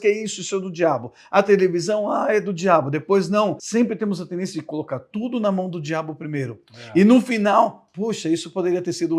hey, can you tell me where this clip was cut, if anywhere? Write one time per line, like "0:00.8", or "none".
0:03.6